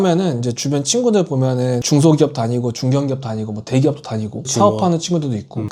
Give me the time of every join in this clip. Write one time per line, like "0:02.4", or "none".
none